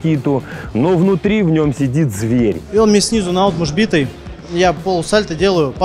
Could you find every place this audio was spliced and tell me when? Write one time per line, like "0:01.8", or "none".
0:02.6